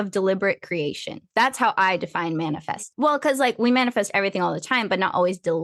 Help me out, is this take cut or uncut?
cut